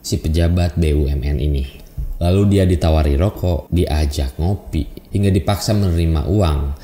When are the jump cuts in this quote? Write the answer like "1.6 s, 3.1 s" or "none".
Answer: 3.6 s, 5.0 s